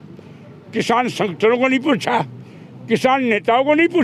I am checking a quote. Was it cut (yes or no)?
no